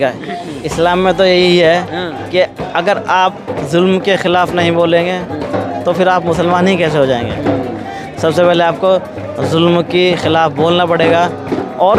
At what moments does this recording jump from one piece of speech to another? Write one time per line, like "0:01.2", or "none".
none